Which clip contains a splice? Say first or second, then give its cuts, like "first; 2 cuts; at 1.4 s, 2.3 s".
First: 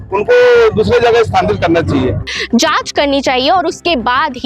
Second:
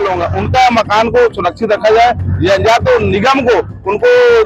first; 1 cut; at 2.3 s